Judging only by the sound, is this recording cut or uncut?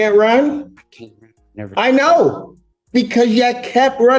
uncut